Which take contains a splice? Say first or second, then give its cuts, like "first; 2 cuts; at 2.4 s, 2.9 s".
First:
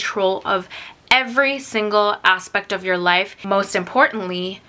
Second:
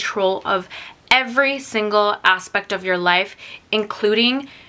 first; 1 cut; at 3.3 s